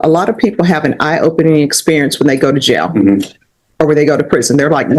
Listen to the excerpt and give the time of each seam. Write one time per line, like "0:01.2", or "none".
none